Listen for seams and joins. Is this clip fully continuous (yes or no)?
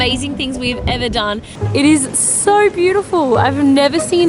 no